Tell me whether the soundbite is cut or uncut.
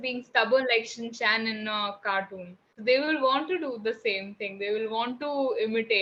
uncut